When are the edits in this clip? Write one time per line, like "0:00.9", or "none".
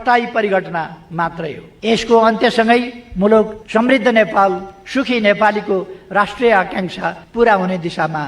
0:01.6
0:03.6
0:07.2